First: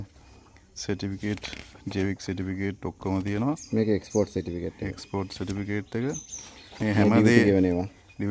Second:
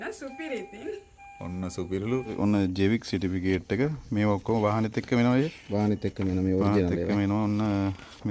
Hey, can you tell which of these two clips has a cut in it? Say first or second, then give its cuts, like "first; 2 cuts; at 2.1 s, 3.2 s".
second; 1 cut; at 2.3 s